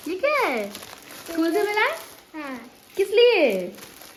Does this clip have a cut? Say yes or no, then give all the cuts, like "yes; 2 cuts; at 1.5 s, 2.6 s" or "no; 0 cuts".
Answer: no; 0 cuts